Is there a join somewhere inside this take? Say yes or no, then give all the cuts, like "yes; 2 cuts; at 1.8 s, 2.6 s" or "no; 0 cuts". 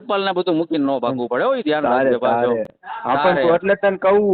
no; 0 cuts